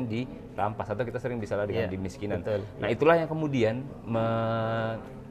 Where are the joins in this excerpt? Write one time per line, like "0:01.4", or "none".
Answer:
none